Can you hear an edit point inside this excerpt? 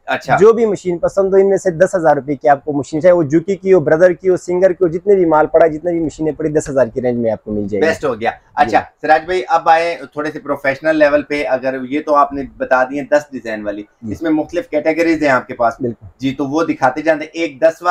no; 0 cuts

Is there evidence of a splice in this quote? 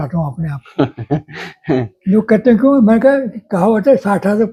no; 0 cuts

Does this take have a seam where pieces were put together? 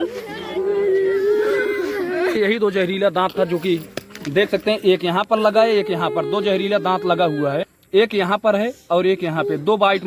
yes; 2 cuts; at 2.4 s, 7.8 s

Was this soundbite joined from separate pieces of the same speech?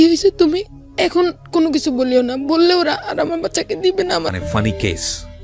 yes; 1 cut; at 4.3 s

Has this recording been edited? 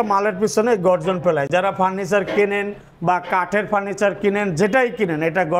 no; 0 cuts

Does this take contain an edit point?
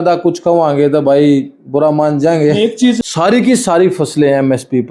yes; 1 cut; at 3.0 s

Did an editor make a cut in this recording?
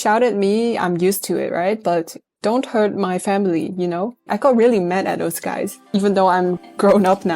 yes; 2 cuts; at 2.2 s, 4.3 s

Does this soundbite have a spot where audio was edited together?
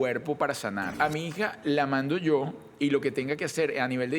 yes; 1 cut; at 0.9 s

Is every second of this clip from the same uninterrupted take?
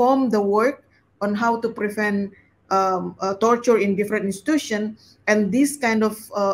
yes; 0 cuts

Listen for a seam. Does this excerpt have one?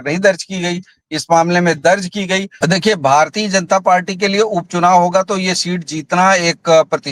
yes; 1 cut; at 2.5 s

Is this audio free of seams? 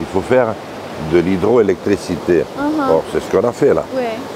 yes; 0 cuts

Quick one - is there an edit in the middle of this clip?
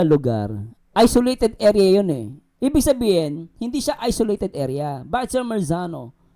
no; 0 cuts

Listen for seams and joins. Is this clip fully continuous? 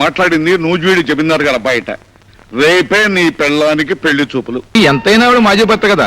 no; 1 cut; at 4.8 s

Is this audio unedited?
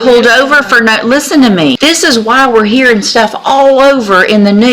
no; 1 cut; at 1.8 s

